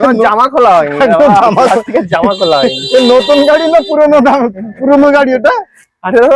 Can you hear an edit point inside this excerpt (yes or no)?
no